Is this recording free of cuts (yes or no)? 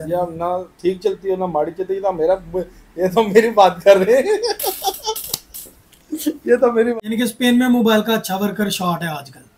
no